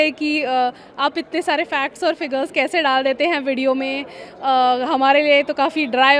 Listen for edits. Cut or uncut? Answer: uncut